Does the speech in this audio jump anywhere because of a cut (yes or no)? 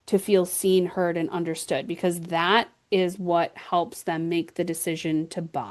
no